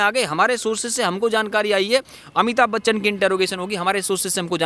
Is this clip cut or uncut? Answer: cut